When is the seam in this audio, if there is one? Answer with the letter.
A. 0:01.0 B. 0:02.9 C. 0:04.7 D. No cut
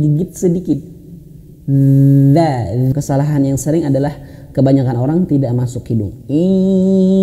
B